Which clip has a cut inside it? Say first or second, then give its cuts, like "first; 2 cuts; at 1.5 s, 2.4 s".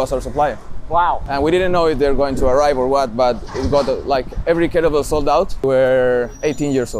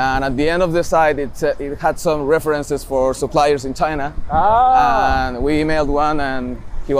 first; 2 cuts; at 1.2 s, 5.6 s